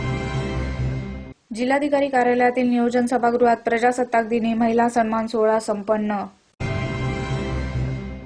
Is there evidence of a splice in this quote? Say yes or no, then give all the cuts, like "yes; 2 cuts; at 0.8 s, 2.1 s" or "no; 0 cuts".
yes; 1 cut; at 0.9 s